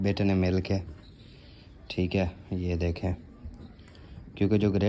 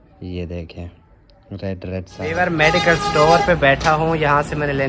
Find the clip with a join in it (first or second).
second